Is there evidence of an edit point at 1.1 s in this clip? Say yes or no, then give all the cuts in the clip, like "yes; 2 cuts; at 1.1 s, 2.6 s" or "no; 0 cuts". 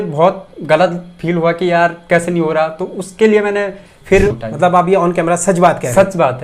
no; 1 cut; at 3.9 s